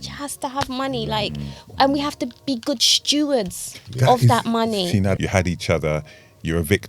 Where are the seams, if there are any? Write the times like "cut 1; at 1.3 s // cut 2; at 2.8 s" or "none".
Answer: cut 1; at 5.2 s